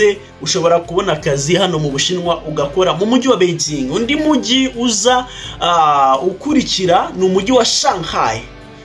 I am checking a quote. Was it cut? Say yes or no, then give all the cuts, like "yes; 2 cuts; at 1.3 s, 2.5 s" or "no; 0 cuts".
no; 0 cuts